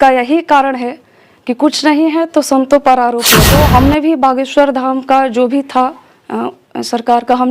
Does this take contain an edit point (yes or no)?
yes